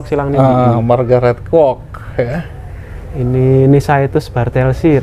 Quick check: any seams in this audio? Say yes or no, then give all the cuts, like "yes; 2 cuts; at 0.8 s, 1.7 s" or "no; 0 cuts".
no; 0 cuts